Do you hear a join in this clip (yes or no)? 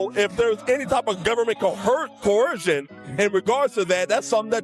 no